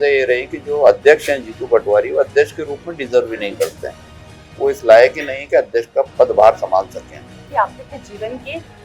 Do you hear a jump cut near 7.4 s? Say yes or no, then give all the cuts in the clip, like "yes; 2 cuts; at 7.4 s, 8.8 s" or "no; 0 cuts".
yes; 1 cut; at 7.4 s